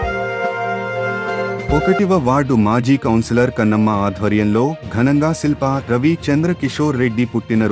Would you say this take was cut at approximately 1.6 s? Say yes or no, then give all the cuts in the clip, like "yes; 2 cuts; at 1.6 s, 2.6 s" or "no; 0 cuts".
no; 0 cuts